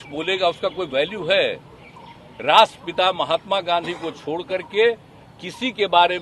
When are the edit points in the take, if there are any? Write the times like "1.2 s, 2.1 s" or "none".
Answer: none